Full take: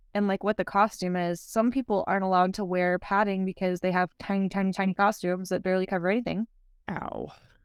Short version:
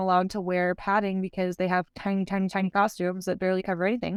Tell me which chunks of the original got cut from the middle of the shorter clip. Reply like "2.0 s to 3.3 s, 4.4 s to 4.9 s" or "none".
none